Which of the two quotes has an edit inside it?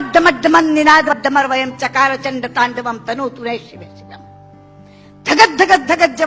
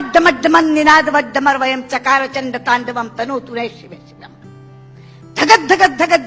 first; 3 cuts; at 1.1 s, 3.8 s, 5.0 s

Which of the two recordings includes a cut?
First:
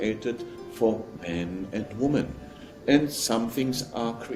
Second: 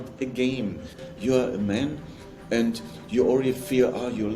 second; 1 cut; at 1.0 s

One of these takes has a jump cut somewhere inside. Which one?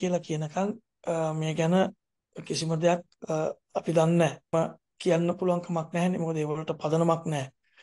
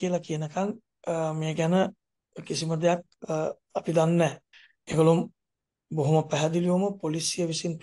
second; 1 cut; at 4.4 s

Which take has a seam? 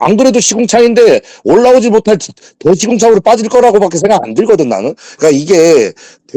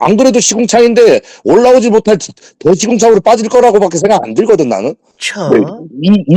first; 1 cut; at 5.1 s

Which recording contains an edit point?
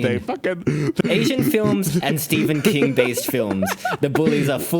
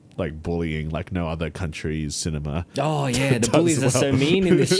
first; 1 cut; at 1.0 s

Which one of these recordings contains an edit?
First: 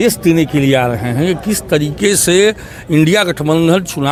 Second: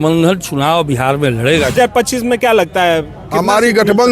second; 1 cut; at 1.8 s

